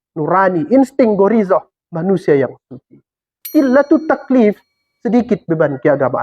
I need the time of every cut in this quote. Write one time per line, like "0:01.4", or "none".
0:03.5